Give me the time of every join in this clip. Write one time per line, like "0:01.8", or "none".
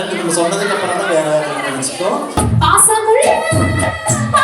0:02.3